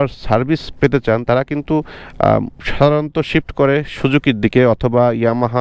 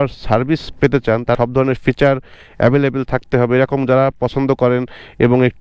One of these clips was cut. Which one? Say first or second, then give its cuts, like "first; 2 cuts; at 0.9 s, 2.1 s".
second; 1 cut; at 1.4 s